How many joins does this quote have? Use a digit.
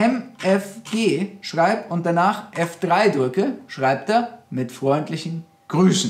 0